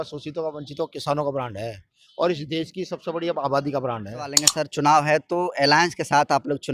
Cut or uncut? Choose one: cut